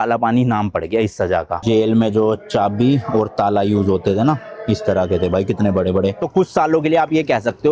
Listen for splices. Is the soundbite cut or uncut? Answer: cut